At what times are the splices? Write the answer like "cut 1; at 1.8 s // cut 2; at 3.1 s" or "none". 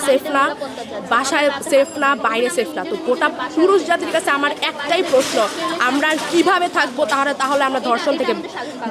none